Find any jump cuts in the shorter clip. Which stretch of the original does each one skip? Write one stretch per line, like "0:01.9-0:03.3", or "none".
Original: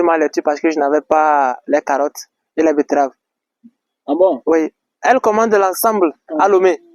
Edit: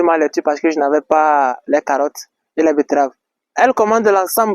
0:03.4-0:04.8